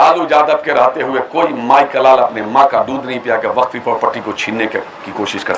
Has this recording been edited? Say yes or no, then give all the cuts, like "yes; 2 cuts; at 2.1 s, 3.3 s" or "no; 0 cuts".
no; 0 cuts